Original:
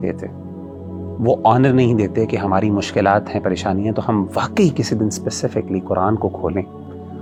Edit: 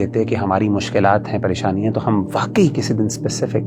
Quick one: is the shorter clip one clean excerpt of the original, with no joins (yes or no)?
yes